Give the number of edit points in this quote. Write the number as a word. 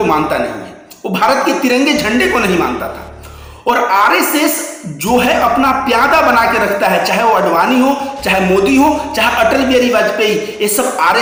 zero